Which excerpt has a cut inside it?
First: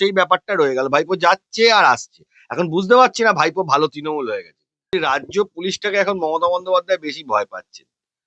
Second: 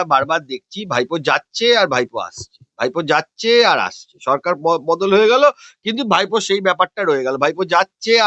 first; 1 cut; at 4.9 s

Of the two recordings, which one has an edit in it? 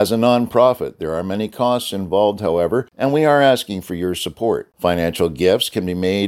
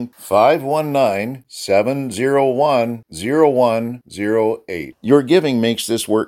first; 1 cut; at 2.9 s

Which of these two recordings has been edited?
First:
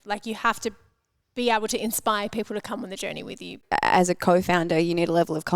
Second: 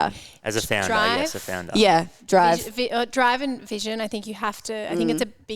first; 1 cut; at 3.6 s

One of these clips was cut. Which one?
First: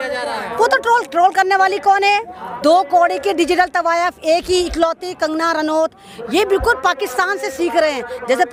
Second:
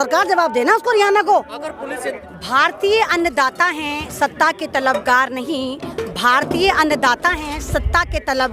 second; 1 cut; at 2.1 s

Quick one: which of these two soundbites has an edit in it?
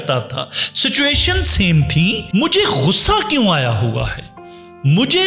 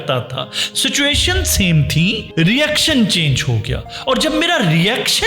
first; 1 cut; at 2.2 s

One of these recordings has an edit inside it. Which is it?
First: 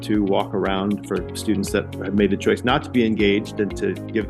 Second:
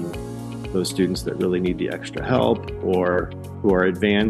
first; 1 cut; at 1.9 s

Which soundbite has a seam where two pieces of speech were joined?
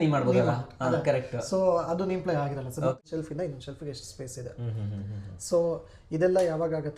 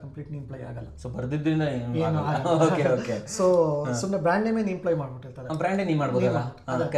first; 1 cut; at 3.0 s

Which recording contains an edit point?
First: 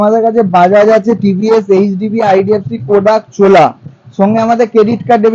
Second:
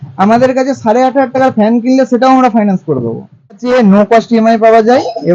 second; 1 cut; at 3.6 s

